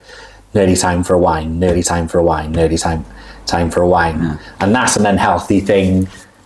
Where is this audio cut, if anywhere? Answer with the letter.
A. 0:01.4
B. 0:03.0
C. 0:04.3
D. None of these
D